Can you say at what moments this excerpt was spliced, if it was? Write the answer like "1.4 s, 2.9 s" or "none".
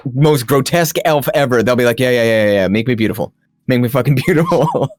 none